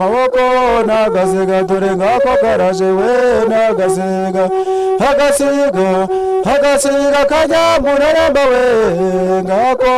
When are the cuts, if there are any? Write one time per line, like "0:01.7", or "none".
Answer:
none